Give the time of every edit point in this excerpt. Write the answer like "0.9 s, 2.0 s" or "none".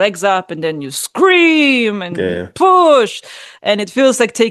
none